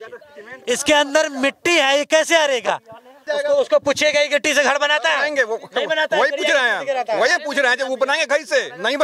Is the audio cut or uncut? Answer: cut